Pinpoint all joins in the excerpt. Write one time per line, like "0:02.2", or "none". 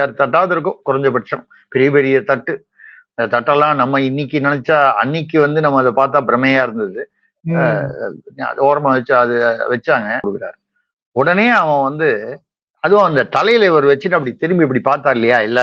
0:10.3